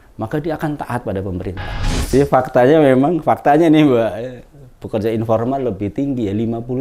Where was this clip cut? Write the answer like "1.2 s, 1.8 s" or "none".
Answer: 2.1 s